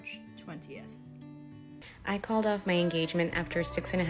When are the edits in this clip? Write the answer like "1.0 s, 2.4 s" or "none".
1.9 s